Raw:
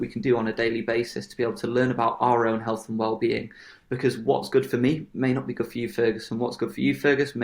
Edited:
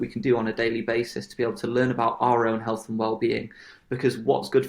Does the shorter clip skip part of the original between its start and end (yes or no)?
no